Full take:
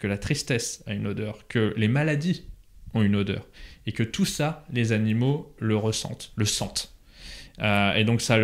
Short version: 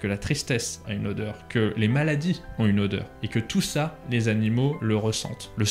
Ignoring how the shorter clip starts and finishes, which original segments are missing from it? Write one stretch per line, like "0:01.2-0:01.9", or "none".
0:02.5-0:02.8
0:03.5-0:03.8
0:05.4-0:05.6